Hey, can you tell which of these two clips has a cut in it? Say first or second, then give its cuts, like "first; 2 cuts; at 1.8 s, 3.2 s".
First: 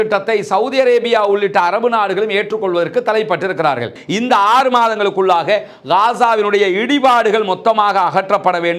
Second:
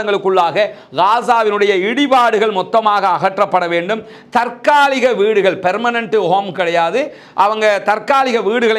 first; 1 cut; at 4.0 s